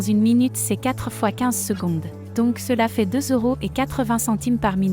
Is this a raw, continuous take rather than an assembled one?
no; 1 cut; at 2.2 s

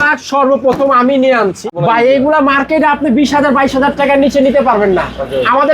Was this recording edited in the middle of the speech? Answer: yes; 1 cut; at 1.7 s

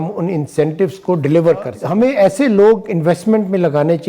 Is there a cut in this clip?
yes; 1 cut; at 1.8 s

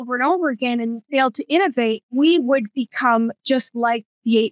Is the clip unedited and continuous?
no; 2 cuts; at 1.0 s, 2.1 s

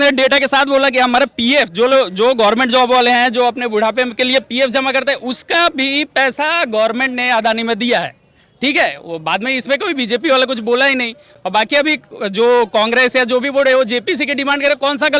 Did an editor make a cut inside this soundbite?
no; 0 cuts

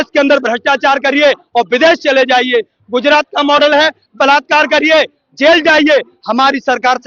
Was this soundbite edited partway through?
no; 0 cuts

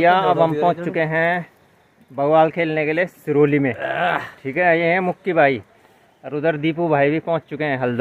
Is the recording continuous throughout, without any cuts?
yes; 0 cuts

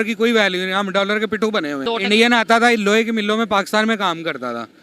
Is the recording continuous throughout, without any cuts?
no; 1 cut; at 1.8 s

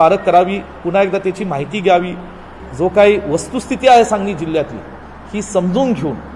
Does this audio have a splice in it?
yes; 1 cut; at 2.6 s

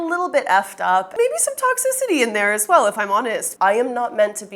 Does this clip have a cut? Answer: yes; 2 cuts; at 1.1 s, 3.4 s

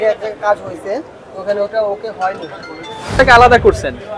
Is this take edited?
yes; 1 cut; at 3.1 s

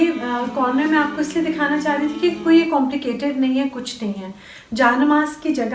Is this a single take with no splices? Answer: yes; 0 cuts

